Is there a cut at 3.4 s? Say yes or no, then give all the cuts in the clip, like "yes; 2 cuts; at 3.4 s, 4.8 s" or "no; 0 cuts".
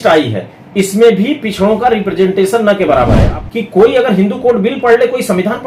yes; 1 cut; at 3.4 s